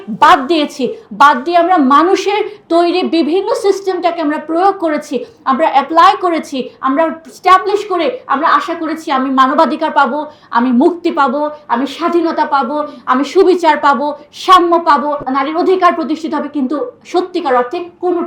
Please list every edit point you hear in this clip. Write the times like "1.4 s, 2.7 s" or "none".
none